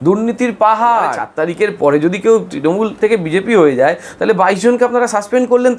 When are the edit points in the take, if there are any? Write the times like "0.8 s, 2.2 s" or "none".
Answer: 1.2 s